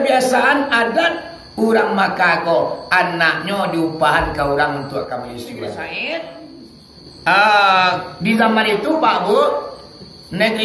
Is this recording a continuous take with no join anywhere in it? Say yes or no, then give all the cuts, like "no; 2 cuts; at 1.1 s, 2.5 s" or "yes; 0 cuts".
no; 1 cut; at 5.7 s